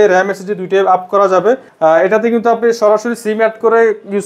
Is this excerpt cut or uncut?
cut